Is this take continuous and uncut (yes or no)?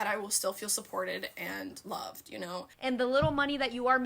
no